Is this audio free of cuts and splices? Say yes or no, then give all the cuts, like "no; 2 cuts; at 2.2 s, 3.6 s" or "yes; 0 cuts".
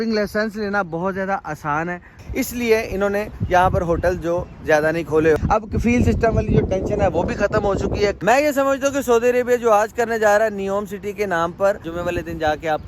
no; 4 cuts; at 2.1 s, 5.4 s, 8.2 s, 11.9 s